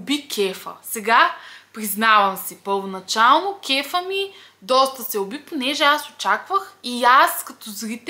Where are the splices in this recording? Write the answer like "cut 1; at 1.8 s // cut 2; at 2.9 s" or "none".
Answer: none

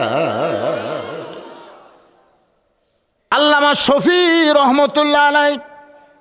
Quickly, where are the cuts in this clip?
cut 1; at 3.3 s

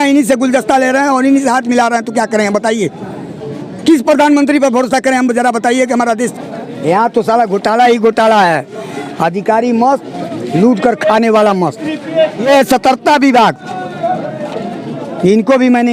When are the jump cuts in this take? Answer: cut 1; at 6.3 s // cut 2; at 12.4 s

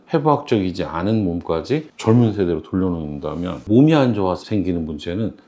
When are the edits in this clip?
cut 1; at 3.6 s

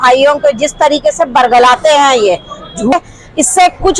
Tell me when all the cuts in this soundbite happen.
cut 1; at 2.9 s

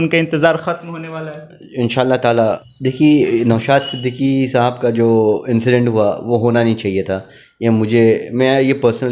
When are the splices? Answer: cut 1; at 2.7 s

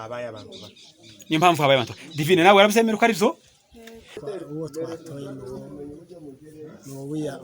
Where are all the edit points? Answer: cut 1; at 4.1 s

